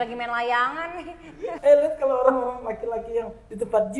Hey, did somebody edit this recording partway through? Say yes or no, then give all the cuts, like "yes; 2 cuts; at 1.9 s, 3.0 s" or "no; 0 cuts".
yes; 1 cut; at 1.5 s